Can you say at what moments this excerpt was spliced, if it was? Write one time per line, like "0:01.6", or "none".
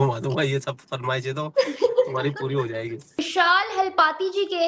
0:03.2